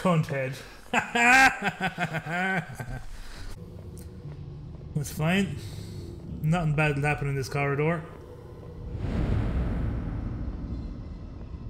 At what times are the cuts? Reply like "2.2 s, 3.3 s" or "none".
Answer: 3.6 s